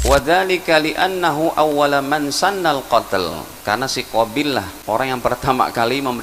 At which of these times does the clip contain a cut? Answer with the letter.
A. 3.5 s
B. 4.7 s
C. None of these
B